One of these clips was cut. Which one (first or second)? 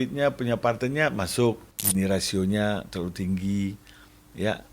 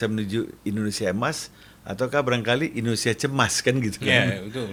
first